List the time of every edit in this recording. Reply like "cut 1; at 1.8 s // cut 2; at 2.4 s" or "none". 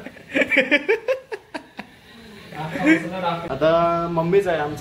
cut 1; at 1.0 s // cut 2; at 3.4 s